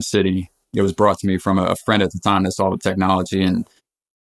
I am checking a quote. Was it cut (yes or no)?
yes